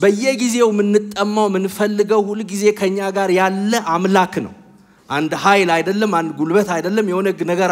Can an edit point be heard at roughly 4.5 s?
no; 0 cuts

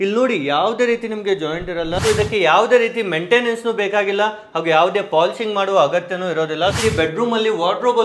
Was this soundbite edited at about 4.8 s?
no; 2 cuts; at 2.0 s, 6.8 s

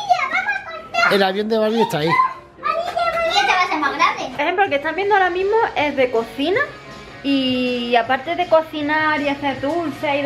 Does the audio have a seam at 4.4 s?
yes; 1 cut; at 4.4 s

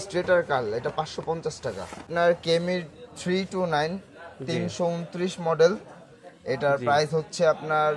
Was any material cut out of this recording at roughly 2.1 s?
yes; 1 cut; at 2.1 s

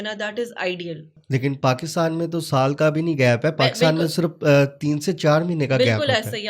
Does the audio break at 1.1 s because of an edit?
yes; 1 cut; at 1.1 s

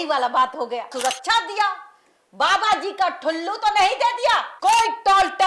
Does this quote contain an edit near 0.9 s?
yes; 2 cuts; at 0.9 s, 4.5 s

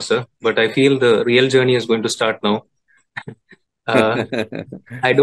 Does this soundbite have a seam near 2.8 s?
no; 0 cuts

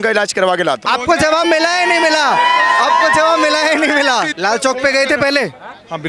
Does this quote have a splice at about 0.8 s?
yes; 2 cuts; at 0.8 s, 4.3 s

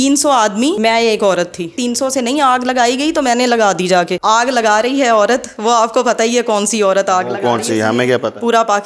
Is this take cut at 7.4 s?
no; 3 cuts; at 0.8 s, 1.8 s, 4.2 s

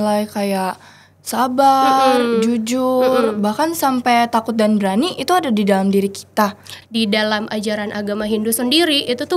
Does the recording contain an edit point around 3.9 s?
no; 1 cut; at 6.8 s

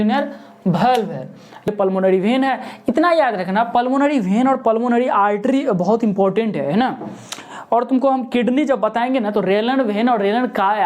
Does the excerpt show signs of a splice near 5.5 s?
no; 1 cut; at 1.7 s

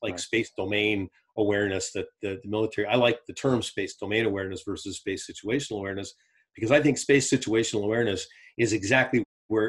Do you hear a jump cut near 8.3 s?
no; 0 cuts

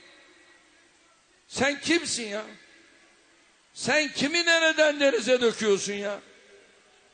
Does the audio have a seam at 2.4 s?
no; 1 cut; at 4.7 s

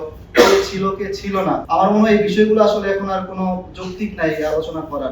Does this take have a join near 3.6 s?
no; 1 cut; at 1.6 s

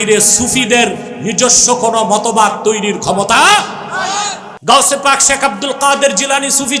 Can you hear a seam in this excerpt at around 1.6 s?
no; 1 cut; at 4.4 s

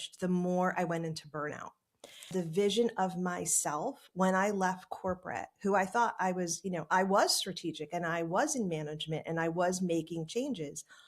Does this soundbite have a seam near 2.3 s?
yes; 1 cut; at 2.3 s

